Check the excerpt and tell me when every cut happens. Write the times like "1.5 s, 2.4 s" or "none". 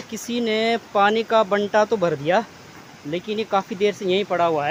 none